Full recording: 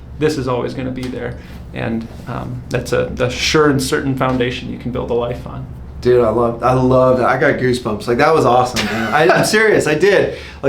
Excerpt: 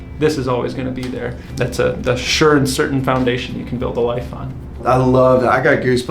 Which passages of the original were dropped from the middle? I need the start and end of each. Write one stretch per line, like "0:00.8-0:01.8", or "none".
0:01.4-0:02.6
0:05.9-0:06.6